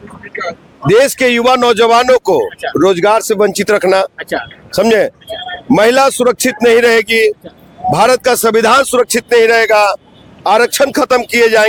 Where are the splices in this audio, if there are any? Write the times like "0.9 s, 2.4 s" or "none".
none